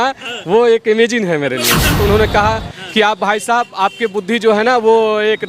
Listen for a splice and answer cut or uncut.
cut